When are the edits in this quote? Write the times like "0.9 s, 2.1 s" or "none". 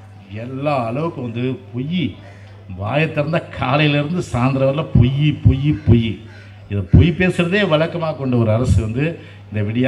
none